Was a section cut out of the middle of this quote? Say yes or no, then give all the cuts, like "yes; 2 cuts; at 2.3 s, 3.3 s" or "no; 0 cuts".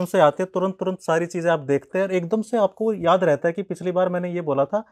no; 0 cuts